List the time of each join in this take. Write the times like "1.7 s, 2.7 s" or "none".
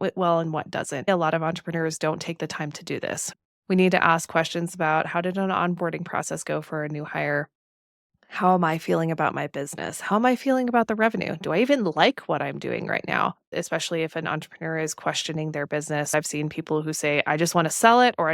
1.1 s, 3.3 s, 13.5 s, 16.1 s

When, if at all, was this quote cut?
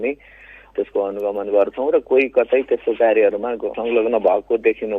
3.7 s

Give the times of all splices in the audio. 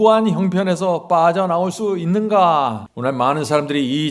2.9 s

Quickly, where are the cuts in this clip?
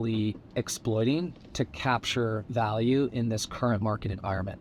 none

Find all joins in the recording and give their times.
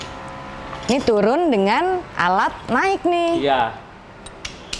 none

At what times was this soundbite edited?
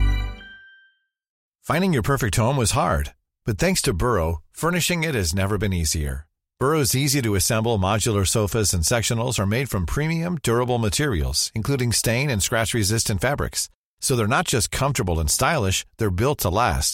1.5 s

